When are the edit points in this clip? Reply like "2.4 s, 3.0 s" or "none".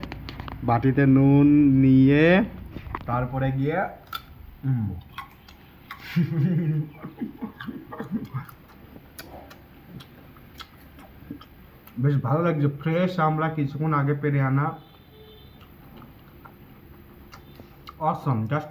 none